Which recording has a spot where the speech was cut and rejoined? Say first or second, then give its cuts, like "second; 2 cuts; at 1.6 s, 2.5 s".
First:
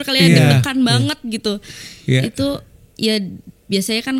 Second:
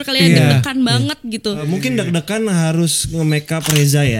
second; 1 cut; at 1.6 s